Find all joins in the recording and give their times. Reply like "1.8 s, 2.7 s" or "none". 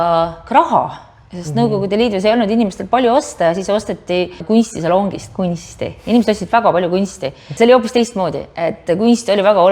4.4 s, 7.4 s